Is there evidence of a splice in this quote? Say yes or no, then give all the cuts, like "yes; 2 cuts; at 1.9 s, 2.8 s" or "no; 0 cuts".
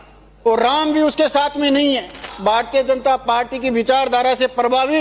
yes; 1 cut; at 2.3 s